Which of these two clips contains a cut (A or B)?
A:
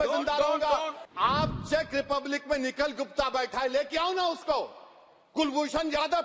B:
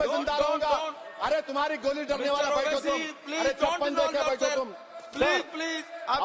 A